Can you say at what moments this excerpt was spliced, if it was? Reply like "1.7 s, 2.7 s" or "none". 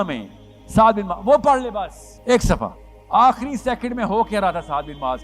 2.0 s, 2.9 s